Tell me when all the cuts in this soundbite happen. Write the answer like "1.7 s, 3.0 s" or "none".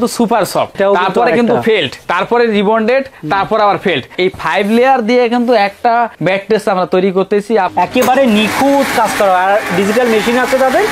0.8 s, 2.0 s, 4.1 s, 6.1 s, 7.7 s